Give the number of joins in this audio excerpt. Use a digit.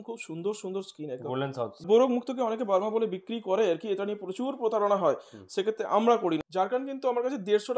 2